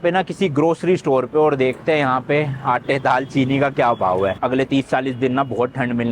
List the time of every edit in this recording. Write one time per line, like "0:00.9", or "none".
none